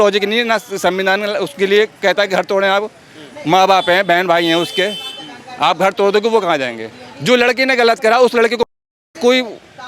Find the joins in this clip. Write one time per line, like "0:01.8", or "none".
none